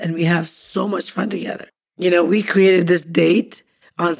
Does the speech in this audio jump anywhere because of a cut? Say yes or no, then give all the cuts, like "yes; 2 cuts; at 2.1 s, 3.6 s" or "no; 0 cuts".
yes; 1 cut; at 1.6 s